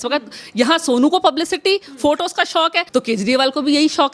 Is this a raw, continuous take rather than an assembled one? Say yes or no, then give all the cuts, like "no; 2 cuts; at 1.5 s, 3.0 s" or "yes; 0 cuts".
no; 1 cut; at 2.8 s